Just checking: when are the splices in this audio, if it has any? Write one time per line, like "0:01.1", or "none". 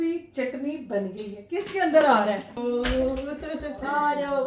0:02.6

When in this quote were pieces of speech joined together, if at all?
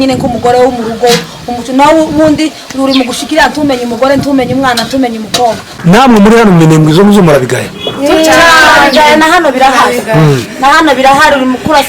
0:05.7

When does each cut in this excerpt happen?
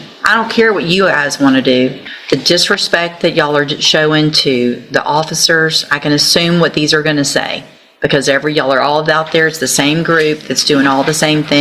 0:02.1

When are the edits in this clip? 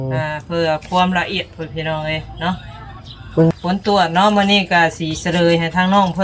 0:03.5

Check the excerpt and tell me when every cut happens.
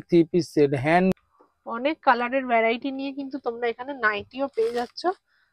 0:01.2

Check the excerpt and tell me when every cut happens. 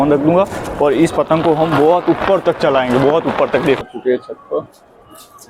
0:03.8

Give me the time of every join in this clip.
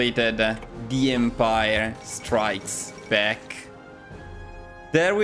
none

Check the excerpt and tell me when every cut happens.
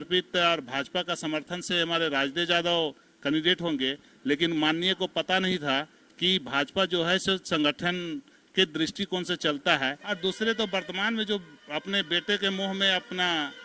0:10.0

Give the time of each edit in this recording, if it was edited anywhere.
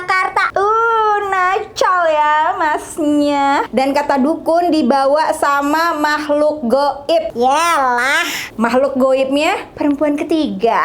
0:03.7
0:09.7

